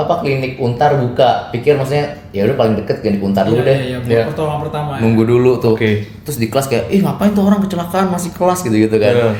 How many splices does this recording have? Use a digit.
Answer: 0